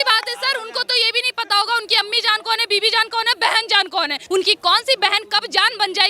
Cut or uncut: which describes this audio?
cut